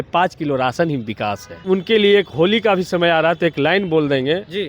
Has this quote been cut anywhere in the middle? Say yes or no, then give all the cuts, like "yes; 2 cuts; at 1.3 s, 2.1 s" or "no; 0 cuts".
yes; 1 cut; at 1.6 s